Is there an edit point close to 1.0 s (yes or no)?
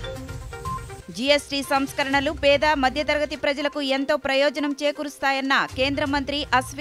no